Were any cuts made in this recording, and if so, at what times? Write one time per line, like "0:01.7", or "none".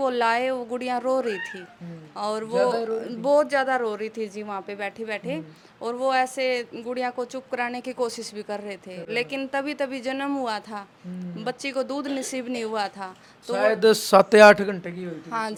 none

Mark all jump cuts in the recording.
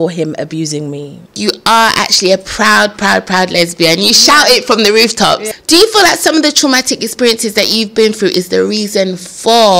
0:01.3
0:05.5

